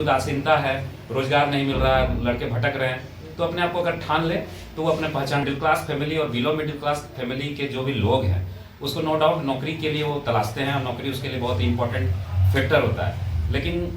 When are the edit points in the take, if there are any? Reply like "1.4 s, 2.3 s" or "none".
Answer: 5.4 s